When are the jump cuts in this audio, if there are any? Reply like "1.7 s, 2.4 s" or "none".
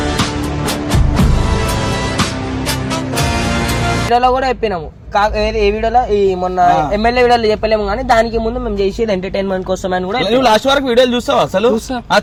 none